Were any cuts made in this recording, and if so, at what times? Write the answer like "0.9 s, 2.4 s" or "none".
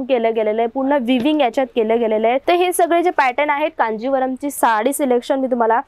2.4 s, 4.6 s